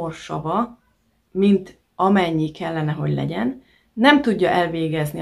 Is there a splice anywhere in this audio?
no; 0 cuts

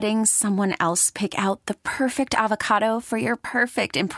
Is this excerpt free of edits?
yes; 0 cuts

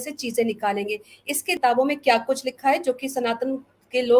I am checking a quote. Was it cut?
yes; 1 cut; at 1.5 s

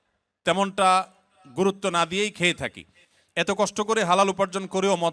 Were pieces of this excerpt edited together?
no; 0 cuts

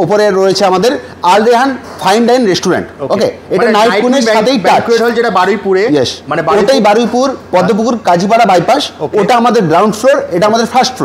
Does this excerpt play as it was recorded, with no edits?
yes; 0 cuts

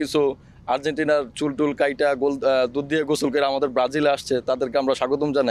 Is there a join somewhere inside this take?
no; 0 cuts

